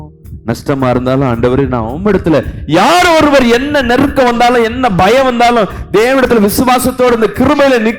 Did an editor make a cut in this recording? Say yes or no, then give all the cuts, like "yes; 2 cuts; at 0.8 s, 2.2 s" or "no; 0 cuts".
no; 0 cuts